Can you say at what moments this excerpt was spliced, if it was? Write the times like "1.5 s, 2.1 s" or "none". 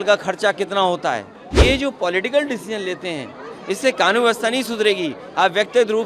1.6 s